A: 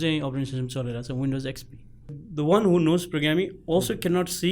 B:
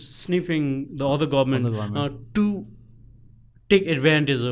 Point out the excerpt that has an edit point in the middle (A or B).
A